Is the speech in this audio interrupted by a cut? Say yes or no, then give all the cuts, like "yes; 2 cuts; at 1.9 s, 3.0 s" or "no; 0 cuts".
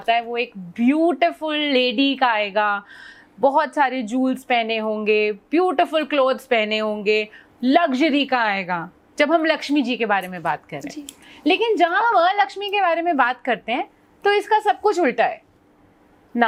no; 0 cuts